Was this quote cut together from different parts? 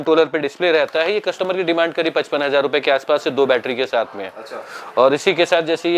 no; 0 cuts

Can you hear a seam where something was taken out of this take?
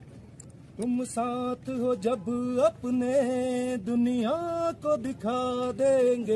no; 0 cuts

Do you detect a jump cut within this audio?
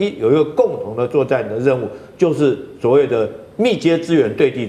no; 0 cuts

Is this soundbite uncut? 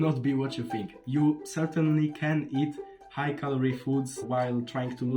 no; 2 cuts; at 1.0 s, 4.2 s

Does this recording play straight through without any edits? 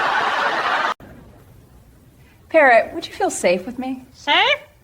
no; 1 cut; at 1.1 s

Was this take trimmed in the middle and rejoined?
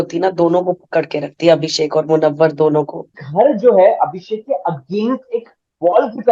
yes; 1 cut; at 3.2 s

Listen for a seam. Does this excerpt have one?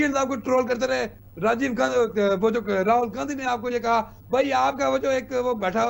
no; 0 cuts

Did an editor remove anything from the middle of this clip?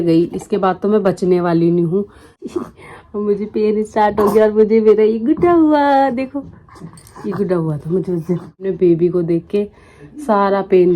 yes; 2 cuts; at 2.3 s, 8.7 s

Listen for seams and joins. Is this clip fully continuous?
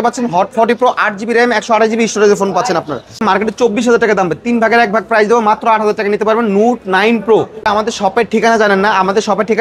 no; 2 cuts; at 3.2 s, 7.6 s

